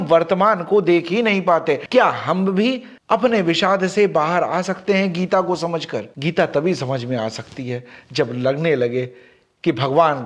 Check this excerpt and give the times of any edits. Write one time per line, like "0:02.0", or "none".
0:01.8
0:06.0

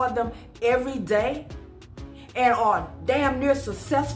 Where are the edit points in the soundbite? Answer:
none

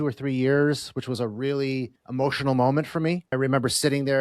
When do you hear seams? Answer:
0:02.0
0:03.3

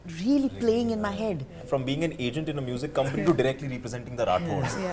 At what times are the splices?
0:01.6

